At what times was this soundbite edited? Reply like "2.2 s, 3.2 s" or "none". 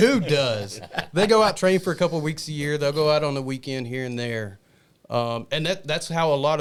none

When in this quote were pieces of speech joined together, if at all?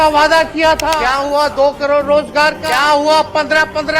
1.0 s, 2.6 s

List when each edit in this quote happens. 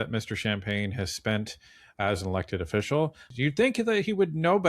3.2 s

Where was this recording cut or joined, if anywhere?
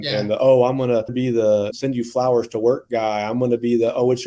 1.4 s

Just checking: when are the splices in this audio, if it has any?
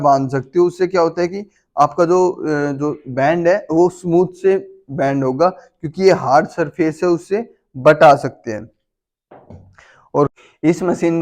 10.3 s

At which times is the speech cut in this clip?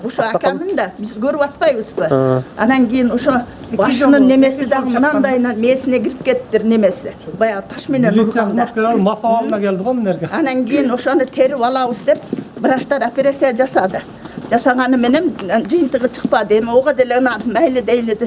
none

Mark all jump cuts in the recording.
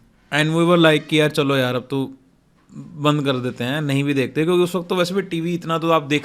none

